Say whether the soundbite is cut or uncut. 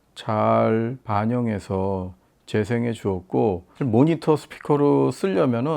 cut